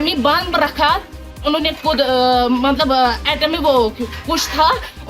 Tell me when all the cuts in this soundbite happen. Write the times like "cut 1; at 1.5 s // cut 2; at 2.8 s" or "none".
cut 1; at 1.4 s